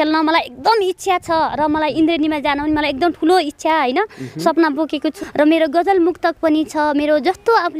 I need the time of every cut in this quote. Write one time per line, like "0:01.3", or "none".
0:05.2